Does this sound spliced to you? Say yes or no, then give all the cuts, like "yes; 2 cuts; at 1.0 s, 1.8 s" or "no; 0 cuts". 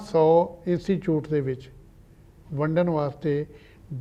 no; 0 cuts